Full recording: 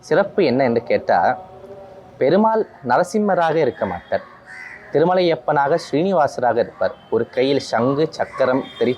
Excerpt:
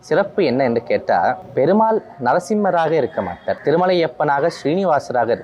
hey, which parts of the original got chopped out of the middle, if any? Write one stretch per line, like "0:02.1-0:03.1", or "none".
0:01.4-0:02.1
0:04.2-0:04.8